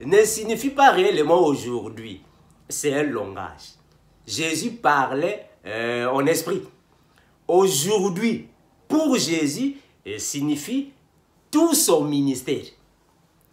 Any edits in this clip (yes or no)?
no